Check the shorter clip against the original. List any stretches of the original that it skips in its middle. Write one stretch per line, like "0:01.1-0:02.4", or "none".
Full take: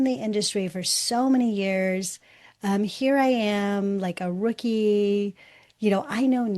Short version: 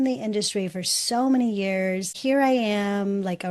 0:02.2-0:02.9